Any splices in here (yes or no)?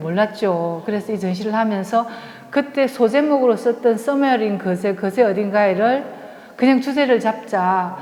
no